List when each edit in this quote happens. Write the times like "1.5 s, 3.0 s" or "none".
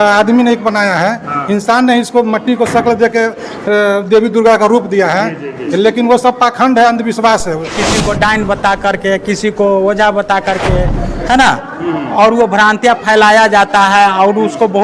7.8 s